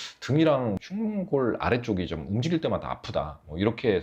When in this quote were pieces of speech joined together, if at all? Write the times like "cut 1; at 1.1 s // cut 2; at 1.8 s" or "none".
none